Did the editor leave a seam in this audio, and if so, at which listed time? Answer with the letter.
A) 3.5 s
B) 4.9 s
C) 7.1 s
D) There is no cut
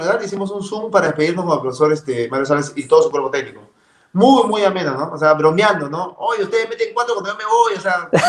D